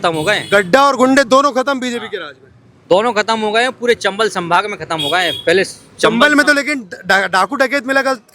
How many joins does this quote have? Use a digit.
0